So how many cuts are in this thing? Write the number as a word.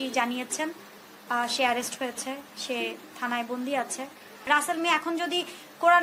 one